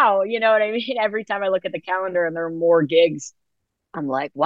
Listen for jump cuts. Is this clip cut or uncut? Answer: uncut